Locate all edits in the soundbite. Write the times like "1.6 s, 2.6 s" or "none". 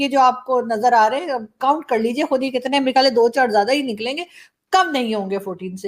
none